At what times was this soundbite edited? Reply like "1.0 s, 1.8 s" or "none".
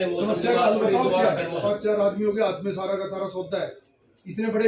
1.6 s